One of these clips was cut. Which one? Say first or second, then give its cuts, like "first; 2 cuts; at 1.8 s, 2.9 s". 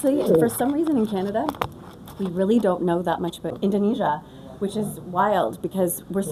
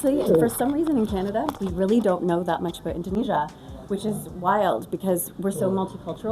second; 2 cuts; at 1.6 s, 3.1 s